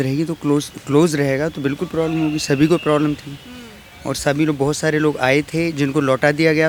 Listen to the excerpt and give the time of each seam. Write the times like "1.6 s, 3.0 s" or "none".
none

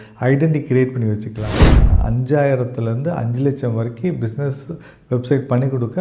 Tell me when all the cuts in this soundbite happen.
1.8 s

